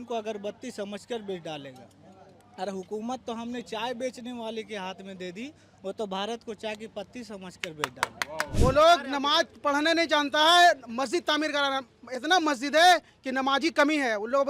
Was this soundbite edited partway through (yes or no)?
yes